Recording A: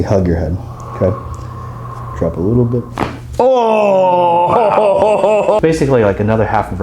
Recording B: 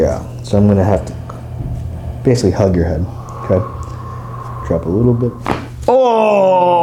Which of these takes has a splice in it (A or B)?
A